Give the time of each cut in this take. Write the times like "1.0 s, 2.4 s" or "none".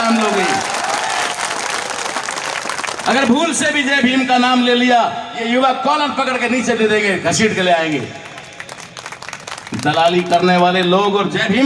none